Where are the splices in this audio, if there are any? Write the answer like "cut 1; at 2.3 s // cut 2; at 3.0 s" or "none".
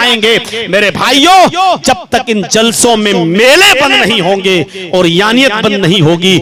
none